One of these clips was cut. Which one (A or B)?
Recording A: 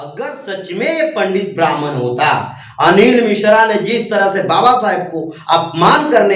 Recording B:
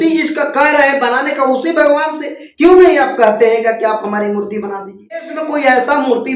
B